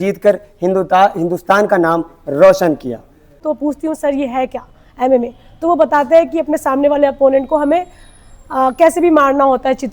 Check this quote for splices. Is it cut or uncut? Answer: cut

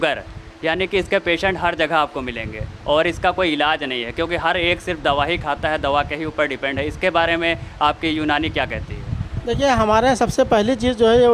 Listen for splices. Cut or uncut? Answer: uncut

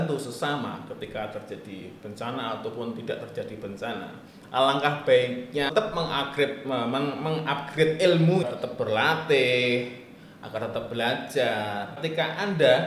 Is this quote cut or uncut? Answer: cut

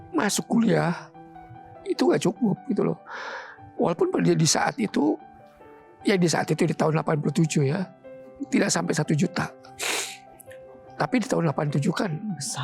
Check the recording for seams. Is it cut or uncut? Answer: uncut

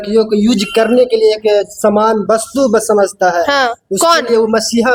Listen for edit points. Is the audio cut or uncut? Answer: uncut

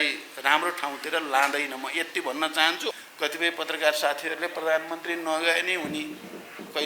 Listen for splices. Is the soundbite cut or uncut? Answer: cut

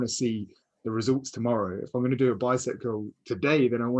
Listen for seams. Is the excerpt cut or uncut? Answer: uncut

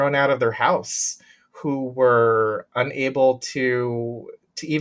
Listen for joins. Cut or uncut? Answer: uncut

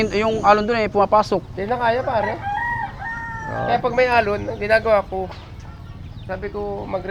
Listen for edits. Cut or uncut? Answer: uncut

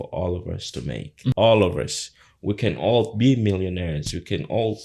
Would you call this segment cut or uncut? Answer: cut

